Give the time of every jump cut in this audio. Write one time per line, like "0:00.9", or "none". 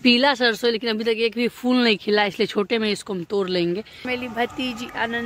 0:04.0